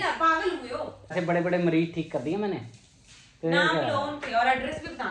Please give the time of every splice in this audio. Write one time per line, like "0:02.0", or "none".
0:01.1